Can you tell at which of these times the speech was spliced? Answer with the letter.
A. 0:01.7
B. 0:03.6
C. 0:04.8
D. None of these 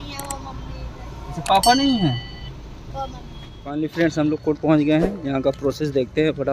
B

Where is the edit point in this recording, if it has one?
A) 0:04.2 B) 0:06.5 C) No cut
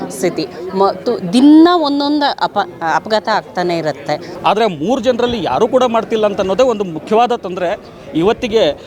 A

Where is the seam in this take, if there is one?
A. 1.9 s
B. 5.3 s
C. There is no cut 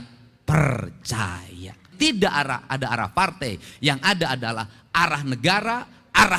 A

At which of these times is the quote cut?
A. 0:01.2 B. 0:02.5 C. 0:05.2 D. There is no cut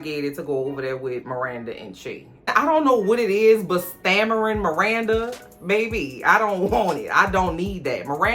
B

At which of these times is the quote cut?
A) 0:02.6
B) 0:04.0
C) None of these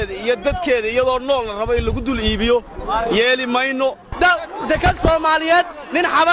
B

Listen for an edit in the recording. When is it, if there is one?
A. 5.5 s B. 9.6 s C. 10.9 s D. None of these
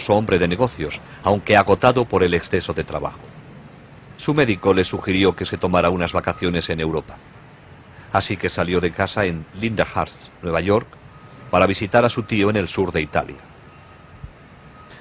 A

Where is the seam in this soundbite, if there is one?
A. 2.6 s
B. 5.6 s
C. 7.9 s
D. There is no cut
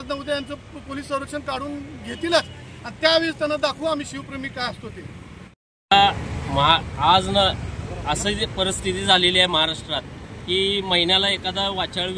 D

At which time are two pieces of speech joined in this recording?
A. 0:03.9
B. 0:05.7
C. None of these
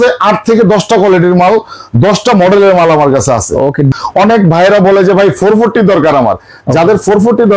A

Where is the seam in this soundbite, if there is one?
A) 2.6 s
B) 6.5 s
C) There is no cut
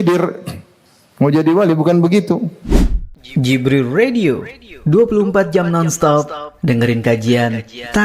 A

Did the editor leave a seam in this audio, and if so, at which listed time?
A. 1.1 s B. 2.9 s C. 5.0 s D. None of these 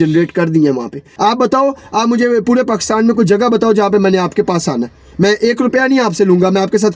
A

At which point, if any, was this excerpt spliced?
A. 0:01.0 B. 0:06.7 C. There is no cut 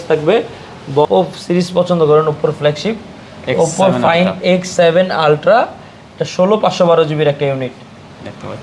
A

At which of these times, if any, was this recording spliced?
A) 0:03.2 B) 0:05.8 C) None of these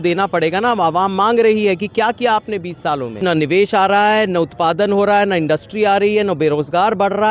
A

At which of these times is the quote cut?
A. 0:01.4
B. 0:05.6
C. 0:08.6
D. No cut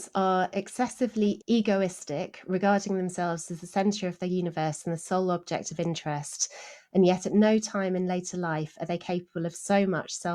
A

